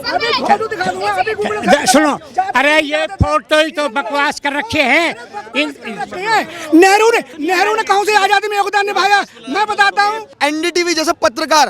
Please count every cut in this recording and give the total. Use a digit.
2